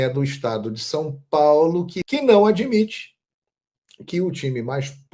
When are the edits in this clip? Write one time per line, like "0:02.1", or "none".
0:01.9